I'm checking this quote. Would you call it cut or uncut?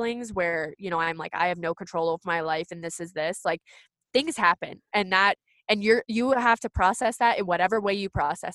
uncut